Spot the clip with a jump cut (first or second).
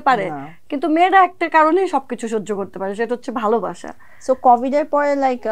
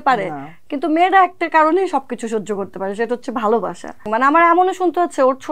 second